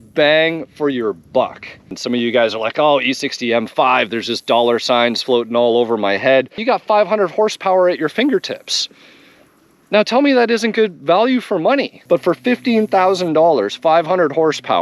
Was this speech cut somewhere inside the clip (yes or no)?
yes